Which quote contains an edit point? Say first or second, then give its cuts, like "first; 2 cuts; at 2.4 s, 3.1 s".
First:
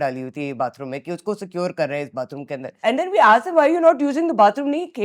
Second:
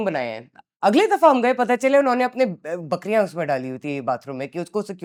first; 1 cut; at 2.8 s